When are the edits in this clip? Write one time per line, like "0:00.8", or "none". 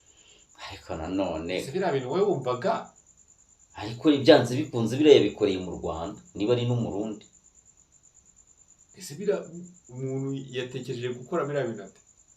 none

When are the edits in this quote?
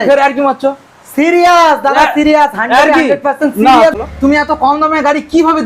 0:03.9

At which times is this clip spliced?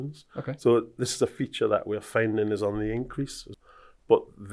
0:03.5

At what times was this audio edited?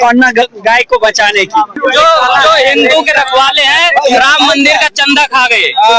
0:01.8

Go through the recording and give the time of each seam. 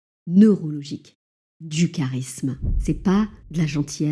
0:02.7

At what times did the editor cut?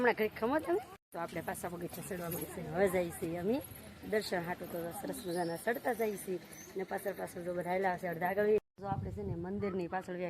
0:01.0
0:08.6

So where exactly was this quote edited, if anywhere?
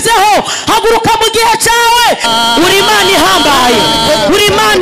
0:02.3

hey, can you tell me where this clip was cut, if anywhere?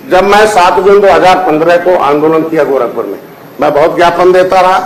none

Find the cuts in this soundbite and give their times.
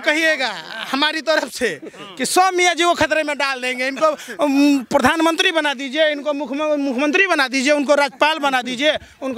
none

